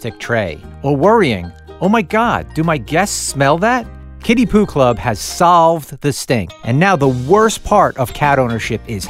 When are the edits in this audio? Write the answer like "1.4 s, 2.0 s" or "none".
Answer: none